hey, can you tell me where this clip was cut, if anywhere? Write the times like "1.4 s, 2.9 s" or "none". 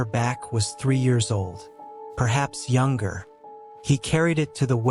none